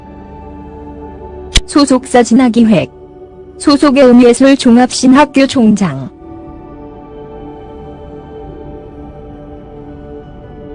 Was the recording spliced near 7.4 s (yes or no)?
yes